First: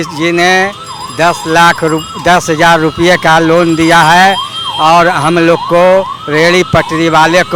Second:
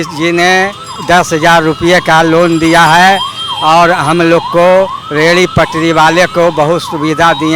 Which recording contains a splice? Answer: second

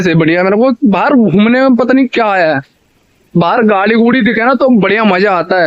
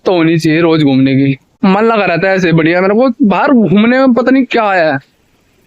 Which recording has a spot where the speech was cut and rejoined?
second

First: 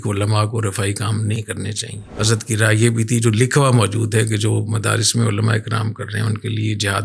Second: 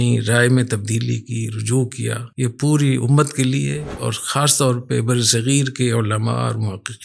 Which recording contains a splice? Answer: second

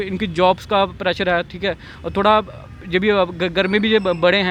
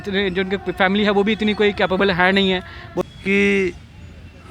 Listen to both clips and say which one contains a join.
second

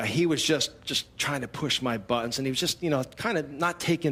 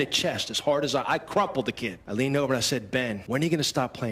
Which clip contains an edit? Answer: second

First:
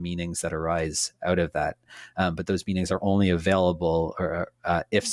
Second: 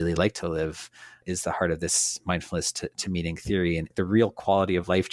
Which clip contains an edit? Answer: second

